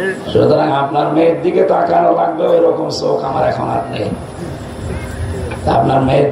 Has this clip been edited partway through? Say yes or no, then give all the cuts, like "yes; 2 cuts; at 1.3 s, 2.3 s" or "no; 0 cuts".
no; 0 cuts